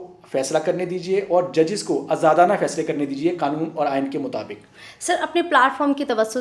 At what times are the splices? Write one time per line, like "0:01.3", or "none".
none